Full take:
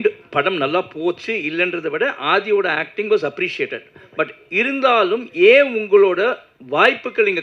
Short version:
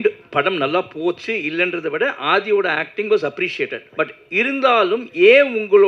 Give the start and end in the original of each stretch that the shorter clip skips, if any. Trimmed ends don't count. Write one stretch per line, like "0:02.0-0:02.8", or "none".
0:03.8-0:04.0